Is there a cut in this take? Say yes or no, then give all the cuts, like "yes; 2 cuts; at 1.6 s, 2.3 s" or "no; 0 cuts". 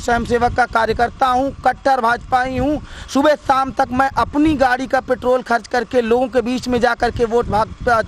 no; 0 cuts